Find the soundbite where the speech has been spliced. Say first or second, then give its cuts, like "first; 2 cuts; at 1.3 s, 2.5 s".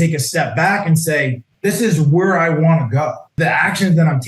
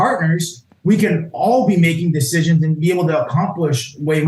first; 2 cuts; at 1.5 s, 3.3 s